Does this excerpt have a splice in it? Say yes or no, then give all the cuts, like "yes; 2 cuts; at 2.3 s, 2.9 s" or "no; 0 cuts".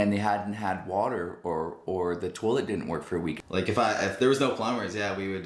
yes; 1 cut; at 3.4 s